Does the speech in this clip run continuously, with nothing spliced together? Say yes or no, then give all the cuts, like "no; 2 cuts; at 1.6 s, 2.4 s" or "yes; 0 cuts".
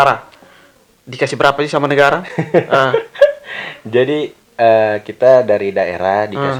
yes; 0 cuts